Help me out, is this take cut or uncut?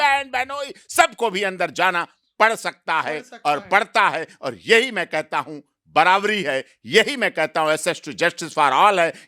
uncut